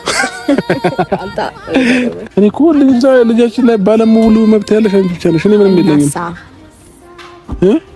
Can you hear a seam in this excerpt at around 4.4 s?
no; 1 cut; at 2.2 s

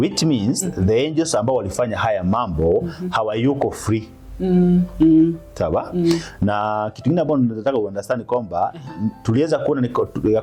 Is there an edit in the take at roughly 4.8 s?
no; 0 cuts

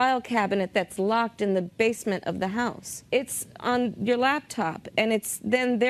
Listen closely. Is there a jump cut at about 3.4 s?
yes; 1 cut; at 3.4 s

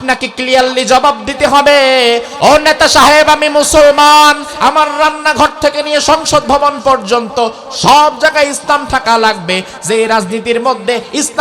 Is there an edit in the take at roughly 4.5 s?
yes; 1 cut; at 4.5 s

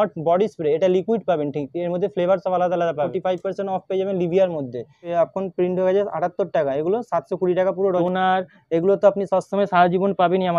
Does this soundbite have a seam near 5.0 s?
yes; 3 cuts; at 3.1 s, 5.0 s, 8.0 s

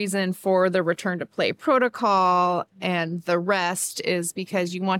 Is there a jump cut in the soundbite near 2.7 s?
yes; 1 cut; at 2.7 s

